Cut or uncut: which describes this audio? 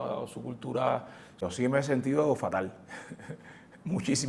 cut